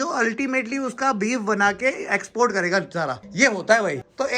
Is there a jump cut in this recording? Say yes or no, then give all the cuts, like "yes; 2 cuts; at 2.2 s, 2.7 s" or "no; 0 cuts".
no; 0 cuts